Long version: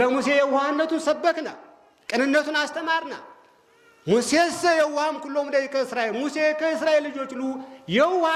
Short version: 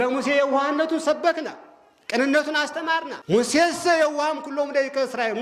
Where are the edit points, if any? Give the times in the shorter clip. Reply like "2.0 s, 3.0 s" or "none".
3.1 s